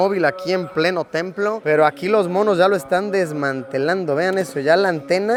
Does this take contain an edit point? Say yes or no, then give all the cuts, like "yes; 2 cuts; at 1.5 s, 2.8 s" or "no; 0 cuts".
no; 0 cuts